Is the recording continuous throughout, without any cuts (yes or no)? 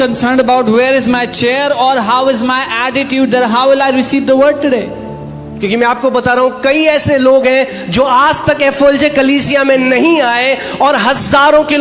yes